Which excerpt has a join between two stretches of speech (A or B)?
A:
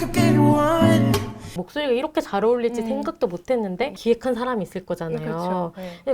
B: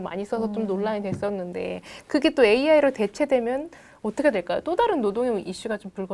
A